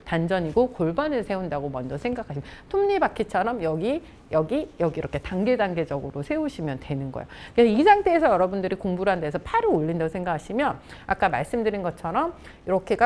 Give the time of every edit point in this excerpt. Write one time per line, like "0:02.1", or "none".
none

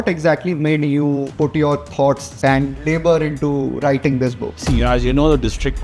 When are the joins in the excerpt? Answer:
0:01.3
0:02.3
0:04.5

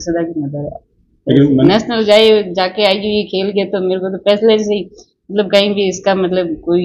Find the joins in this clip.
none

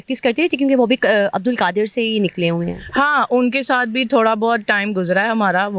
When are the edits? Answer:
none

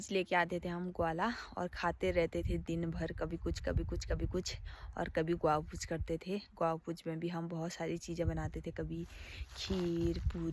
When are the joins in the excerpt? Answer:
none

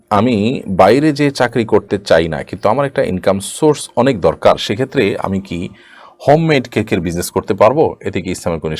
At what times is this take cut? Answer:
none

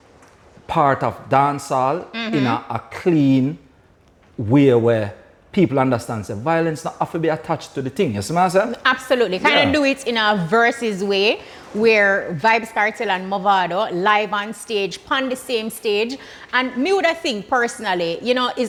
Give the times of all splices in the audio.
none

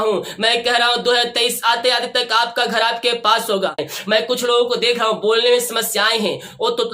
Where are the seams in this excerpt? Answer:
0:03.9

